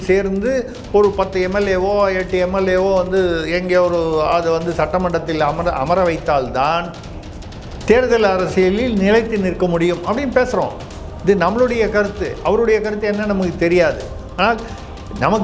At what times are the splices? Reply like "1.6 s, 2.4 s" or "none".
none

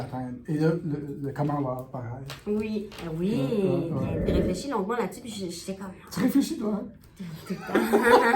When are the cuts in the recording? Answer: 4.2 s

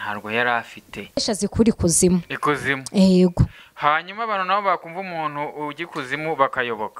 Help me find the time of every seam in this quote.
1.0 s

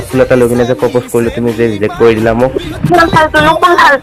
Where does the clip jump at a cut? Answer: 3.1 s

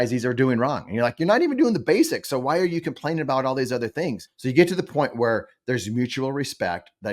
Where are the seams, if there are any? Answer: 3.9 s

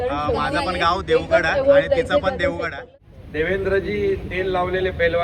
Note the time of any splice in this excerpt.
2.8 s

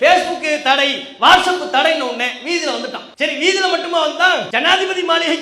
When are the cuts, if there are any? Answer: 3.0 s, 4.5 s

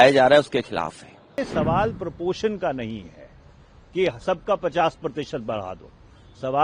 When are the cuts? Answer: 1.2 s

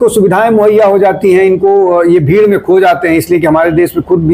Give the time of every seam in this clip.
none

